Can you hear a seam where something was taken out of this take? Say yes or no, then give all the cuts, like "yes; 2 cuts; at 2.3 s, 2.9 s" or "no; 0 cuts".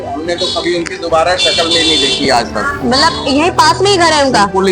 no; 0 cuts